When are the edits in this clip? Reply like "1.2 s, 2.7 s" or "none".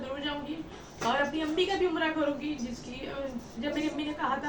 none